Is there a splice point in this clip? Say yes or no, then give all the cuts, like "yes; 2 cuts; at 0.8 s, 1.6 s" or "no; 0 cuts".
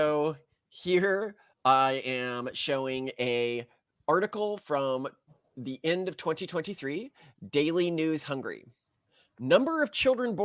no; 0 cuts